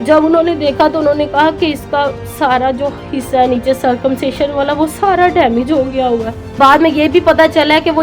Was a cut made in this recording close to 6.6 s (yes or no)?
yes